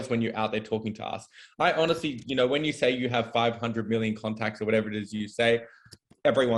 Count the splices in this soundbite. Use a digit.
0